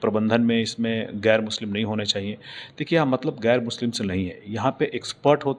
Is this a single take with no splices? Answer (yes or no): yes